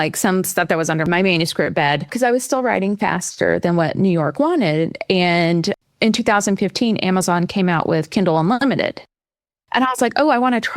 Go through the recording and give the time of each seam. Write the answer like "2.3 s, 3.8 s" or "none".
1.0 s, 2.1 s, 5.8 s